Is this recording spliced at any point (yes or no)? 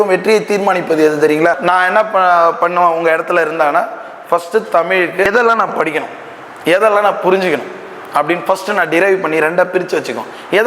yes